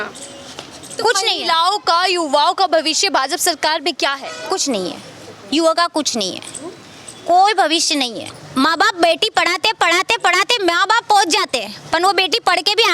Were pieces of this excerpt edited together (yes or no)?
yes